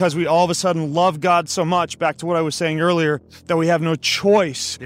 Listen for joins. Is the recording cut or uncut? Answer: uncut